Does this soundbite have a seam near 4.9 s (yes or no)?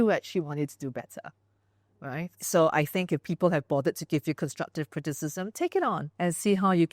no